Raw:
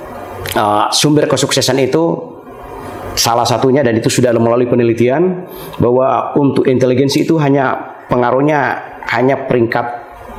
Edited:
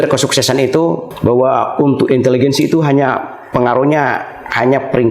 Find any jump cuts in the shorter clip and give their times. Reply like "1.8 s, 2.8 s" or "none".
1.1 s